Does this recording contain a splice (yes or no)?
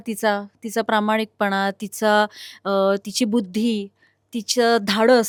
no